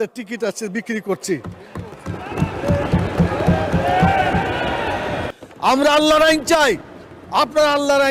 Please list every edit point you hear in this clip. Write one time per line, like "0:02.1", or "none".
0:05.3